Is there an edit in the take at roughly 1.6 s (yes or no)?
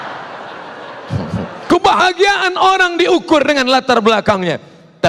yes